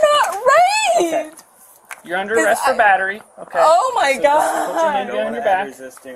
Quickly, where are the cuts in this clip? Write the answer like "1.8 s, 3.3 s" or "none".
none